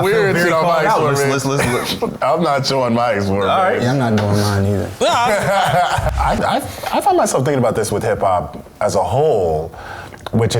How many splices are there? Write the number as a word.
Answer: one